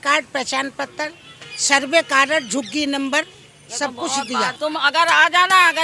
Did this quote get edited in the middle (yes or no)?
yes